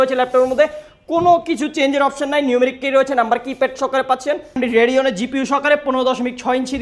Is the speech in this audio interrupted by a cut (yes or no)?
yes